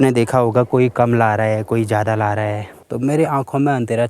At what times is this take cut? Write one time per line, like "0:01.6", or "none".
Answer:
0:02.7